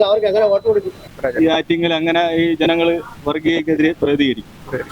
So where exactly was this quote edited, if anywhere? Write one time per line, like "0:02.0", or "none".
0:01.0